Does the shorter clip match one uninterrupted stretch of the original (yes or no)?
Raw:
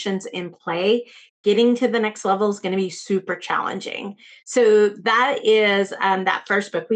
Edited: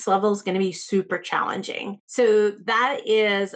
no